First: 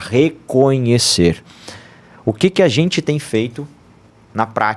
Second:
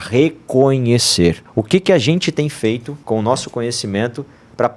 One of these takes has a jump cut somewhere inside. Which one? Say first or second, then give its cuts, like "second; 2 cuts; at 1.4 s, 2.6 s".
second; 2 cuts; at 1.4 s, 2.9 s